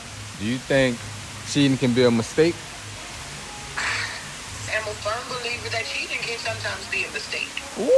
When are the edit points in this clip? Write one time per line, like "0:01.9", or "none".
0:02.9
0:04.7